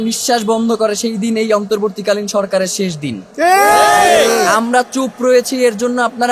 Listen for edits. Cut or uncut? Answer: uncut